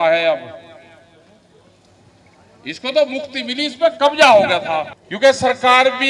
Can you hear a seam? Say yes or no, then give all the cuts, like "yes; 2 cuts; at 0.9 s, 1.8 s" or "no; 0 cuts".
yes; 1 cut; at 5.0 s